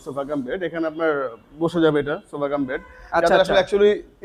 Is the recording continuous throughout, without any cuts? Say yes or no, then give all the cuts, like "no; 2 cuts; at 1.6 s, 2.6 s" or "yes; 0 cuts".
yes; 0 cuts